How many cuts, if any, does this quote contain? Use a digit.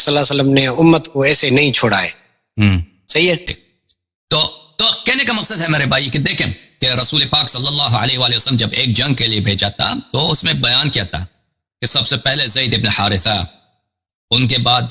1